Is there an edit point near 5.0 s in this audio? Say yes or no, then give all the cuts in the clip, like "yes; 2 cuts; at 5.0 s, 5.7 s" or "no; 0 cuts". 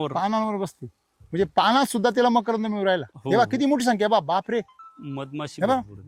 no; 0 cuts